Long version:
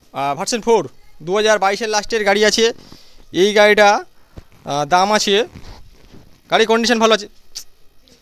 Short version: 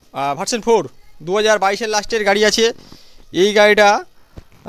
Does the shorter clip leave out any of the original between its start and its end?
no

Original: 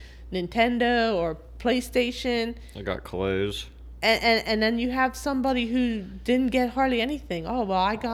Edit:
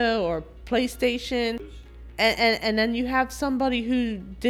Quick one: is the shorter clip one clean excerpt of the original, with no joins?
no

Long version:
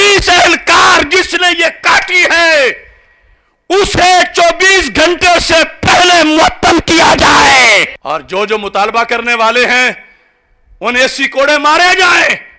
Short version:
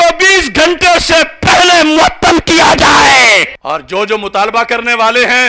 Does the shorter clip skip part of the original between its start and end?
no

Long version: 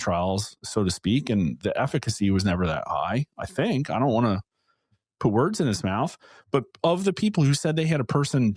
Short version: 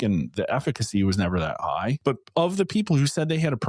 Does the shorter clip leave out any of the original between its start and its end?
yes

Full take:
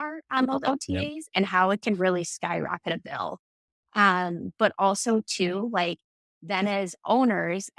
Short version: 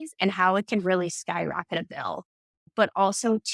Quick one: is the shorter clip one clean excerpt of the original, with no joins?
no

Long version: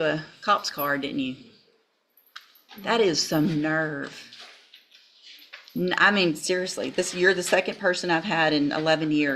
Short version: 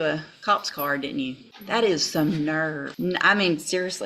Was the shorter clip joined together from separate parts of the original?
yes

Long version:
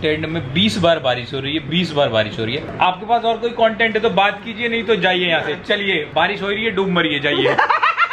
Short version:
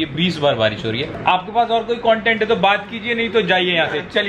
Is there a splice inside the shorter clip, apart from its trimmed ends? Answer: no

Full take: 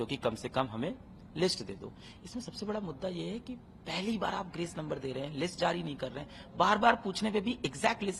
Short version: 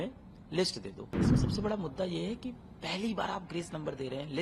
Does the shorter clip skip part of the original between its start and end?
yes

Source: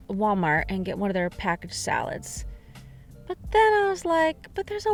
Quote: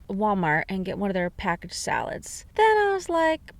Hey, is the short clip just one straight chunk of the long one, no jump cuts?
no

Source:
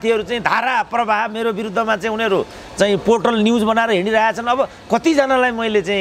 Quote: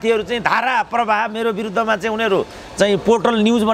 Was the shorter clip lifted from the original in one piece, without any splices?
yes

